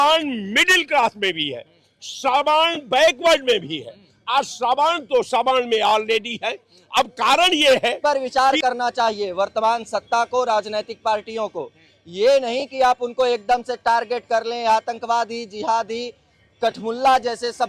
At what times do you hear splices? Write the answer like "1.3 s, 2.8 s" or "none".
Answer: 8.0 s